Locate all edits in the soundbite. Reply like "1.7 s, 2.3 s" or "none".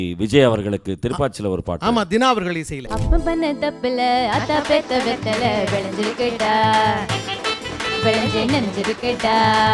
2.8 s